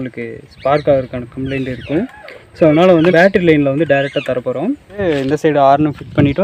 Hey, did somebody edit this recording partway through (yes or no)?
yes